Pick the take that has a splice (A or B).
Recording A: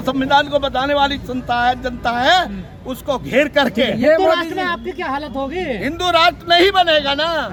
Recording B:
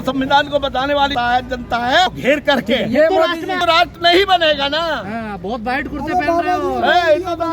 B